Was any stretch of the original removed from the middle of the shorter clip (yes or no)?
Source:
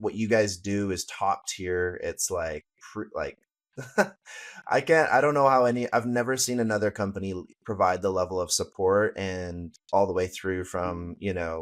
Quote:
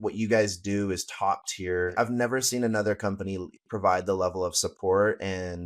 yes